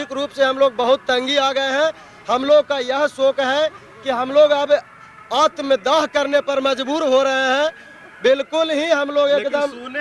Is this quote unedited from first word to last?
yes; 0 cuts

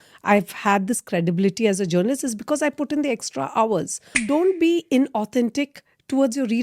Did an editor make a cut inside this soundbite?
yes; 1 cut; at 4.1 s

